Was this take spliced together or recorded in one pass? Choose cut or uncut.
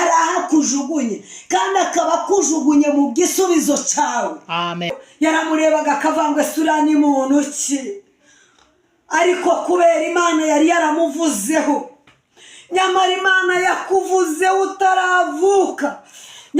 cut